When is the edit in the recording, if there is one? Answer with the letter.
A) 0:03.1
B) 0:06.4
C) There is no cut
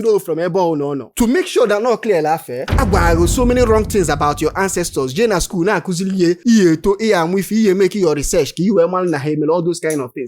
B